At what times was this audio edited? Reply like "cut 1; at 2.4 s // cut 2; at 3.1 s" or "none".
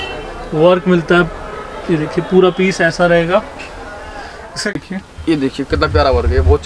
cut 1; at 4.8 s